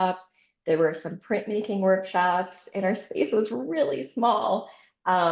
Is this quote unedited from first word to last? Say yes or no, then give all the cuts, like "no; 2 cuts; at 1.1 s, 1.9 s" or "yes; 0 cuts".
yes; 0 cuts